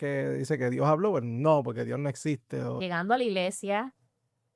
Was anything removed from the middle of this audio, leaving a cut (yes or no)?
yes